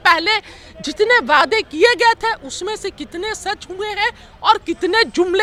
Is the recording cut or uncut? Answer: uncut